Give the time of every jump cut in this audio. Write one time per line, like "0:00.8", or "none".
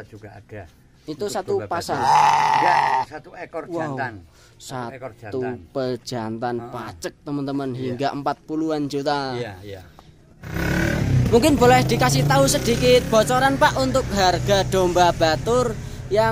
0:10.5